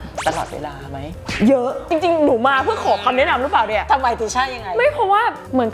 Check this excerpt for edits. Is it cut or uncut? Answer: uncut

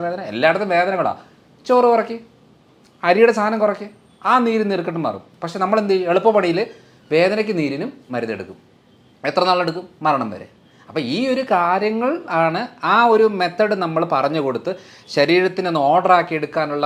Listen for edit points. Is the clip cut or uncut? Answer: uncut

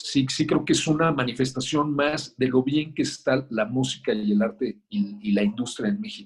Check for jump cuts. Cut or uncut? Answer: uncut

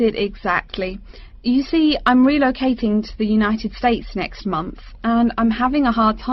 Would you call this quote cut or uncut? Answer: uncut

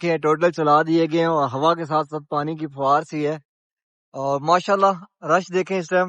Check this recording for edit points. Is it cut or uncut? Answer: uncut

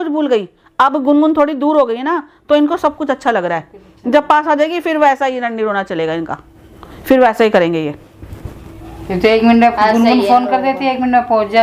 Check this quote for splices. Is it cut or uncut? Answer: uncut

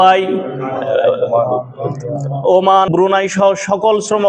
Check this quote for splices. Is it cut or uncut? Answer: cut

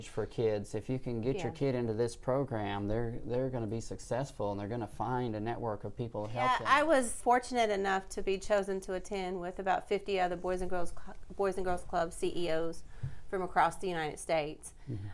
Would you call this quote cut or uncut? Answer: cut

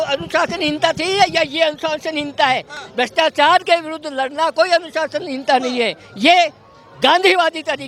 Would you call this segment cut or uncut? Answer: uncut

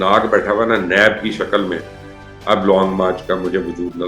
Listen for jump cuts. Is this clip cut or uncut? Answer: cut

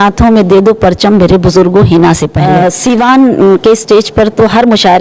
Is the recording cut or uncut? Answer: cut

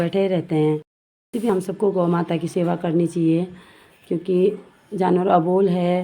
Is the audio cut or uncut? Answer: cut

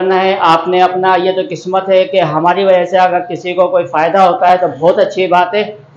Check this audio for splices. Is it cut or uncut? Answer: uncut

